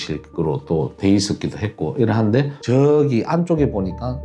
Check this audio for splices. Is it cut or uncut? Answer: cut